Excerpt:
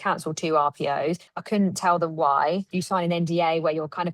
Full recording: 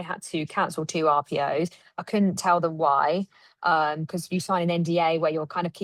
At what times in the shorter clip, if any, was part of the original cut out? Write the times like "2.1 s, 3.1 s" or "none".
1.3 s, 2.7 s